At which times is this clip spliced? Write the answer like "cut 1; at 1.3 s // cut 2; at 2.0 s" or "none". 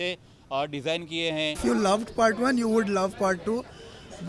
cut 1; at 1.6 s